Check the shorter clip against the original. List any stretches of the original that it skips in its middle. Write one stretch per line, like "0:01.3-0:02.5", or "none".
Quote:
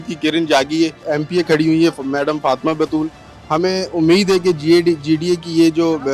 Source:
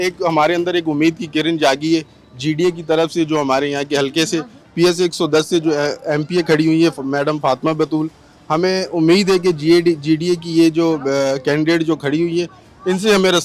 0:02.1-0:06.0